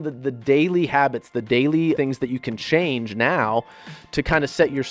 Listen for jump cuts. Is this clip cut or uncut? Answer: cut